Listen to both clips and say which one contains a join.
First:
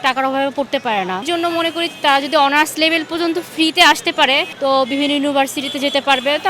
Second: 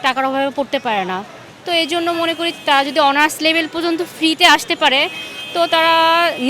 first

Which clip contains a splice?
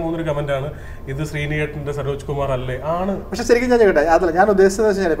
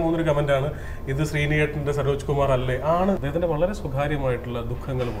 second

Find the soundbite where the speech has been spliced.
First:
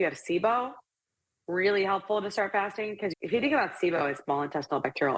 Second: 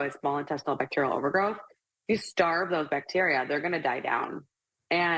first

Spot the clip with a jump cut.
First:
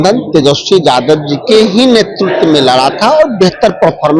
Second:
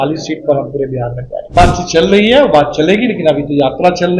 second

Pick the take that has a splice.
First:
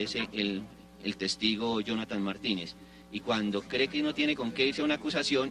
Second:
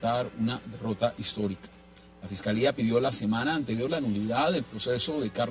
first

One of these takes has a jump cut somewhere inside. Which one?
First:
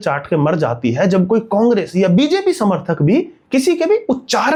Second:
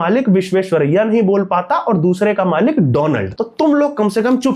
second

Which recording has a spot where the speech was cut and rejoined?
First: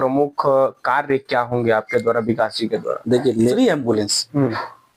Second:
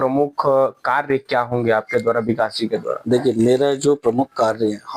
first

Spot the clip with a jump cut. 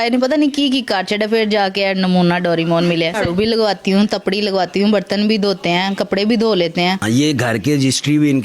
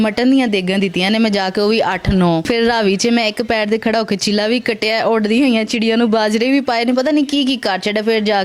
first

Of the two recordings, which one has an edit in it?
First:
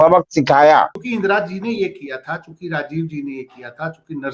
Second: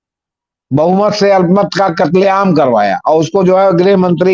first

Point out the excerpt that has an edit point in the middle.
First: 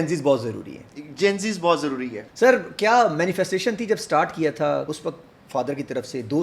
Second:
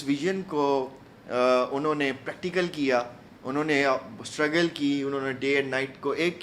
first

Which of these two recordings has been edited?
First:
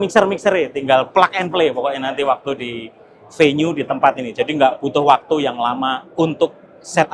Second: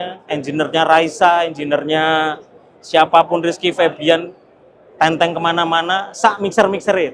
first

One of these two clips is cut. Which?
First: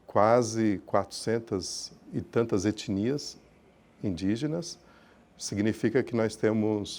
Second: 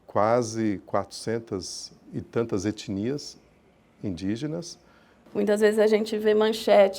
second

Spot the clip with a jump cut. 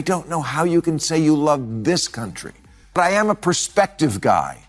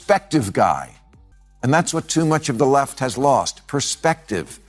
first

